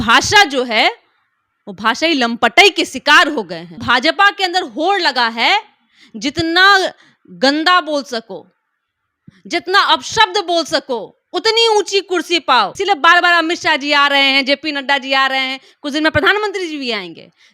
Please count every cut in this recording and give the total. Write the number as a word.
two